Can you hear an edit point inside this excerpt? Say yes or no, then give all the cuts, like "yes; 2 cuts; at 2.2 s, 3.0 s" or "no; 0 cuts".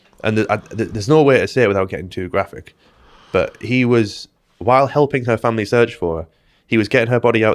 no; 0 cuts